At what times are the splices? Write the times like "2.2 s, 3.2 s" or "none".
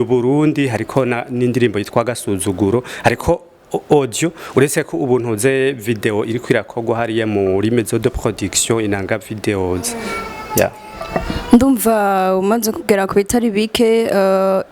none